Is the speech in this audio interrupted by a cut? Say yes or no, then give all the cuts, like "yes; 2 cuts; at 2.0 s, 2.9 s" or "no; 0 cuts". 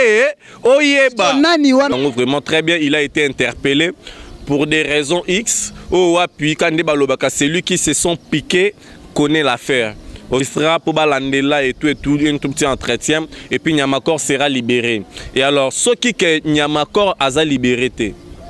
yes; 2 cuts; at 1.9 s, 10.4 s